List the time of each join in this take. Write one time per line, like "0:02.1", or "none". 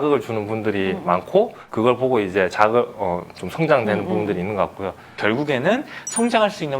0:05.1